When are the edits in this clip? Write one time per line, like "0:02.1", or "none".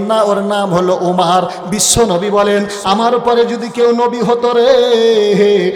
none